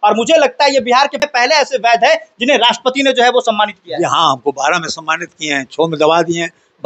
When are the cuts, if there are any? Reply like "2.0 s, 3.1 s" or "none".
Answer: 1.2 s

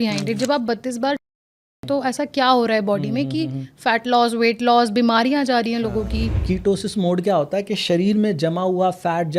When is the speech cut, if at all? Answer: 6.3 s

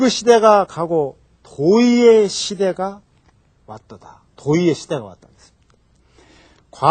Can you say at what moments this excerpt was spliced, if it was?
3.7 s

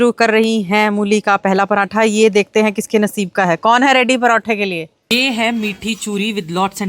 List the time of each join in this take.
5.0 s

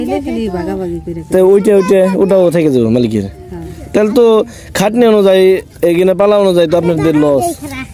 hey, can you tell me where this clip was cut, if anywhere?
none

